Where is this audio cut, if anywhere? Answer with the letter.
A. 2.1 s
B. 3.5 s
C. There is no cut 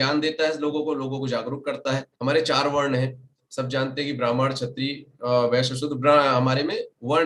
A